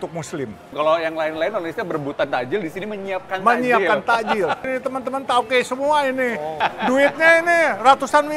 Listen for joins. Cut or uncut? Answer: uncut